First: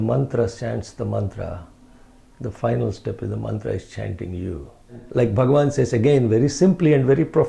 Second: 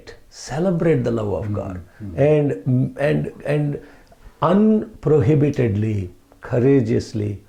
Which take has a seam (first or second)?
first